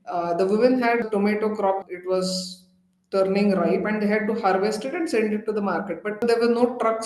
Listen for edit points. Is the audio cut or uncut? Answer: cut